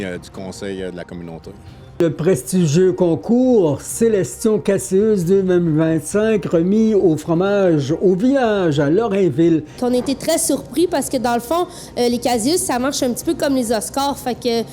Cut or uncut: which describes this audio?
cut